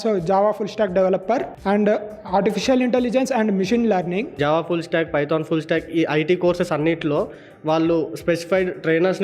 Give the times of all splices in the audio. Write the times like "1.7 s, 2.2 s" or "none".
1.5 s, 4.3 s